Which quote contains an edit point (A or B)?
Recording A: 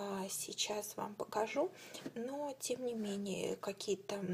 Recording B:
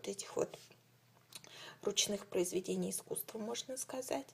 B